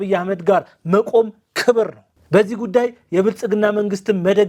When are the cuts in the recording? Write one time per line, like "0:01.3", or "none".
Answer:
none